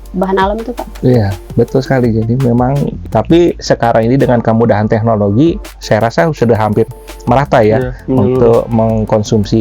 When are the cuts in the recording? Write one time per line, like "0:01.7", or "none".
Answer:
0:03.0